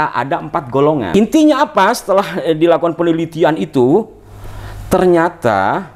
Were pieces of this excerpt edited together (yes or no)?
yes